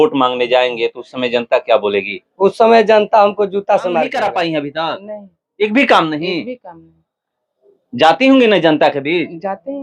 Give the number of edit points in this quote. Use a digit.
1